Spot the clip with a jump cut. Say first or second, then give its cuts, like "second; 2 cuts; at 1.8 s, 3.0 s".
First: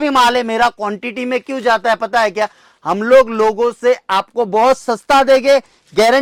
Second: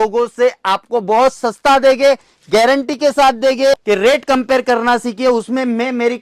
second; 1 cut; at 3.8 s